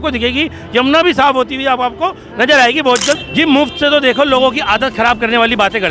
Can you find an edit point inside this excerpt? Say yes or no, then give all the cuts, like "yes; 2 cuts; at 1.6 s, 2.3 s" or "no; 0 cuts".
yes; 1 cut; at 3.2 s